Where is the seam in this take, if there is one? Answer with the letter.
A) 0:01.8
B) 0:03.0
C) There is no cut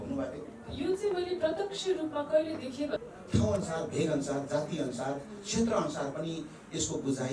B